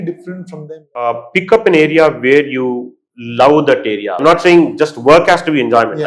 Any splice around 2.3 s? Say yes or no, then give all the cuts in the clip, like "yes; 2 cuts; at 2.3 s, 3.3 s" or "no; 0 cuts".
no; 2 cuts; at 1.0 s, 4.1 s